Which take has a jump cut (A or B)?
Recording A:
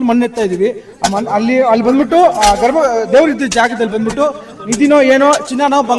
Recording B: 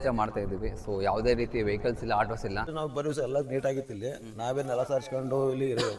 B